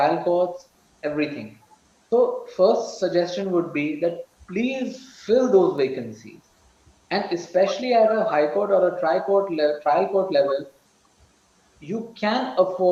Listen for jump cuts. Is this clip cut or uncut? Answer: uncut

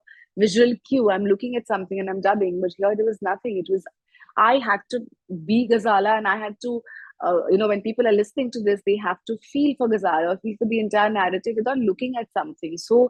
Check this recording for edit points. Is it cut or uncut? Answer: uncut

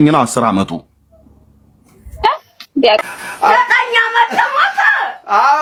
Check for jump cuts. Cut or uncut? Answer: uncut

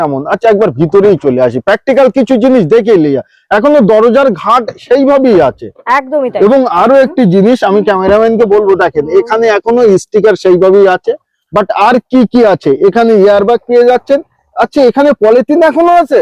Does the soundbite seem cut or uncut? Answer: uncut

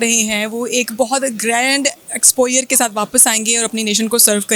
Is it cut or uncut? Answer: uncut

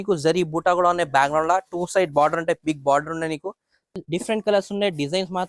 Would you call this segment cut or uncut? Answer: cut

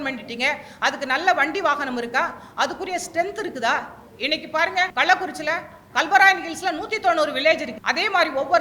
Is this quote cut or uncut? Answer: cut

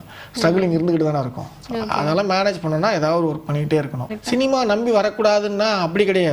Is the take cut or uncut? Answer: cut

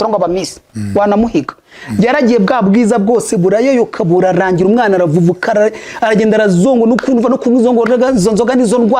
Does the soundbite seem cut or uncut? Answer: uncut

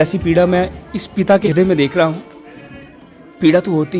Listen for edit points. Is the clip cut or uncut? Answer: cut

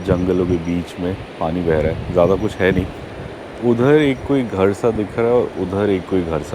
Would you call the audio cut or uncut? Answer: uncut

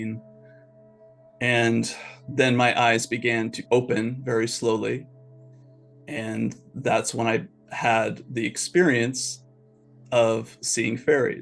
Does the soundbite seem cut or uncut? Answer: cut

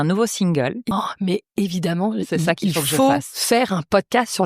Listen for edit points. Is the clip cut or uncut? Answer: cut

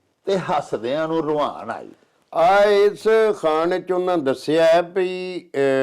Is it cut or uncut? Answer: uncut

